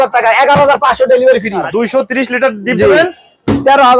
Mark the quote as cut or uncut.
cut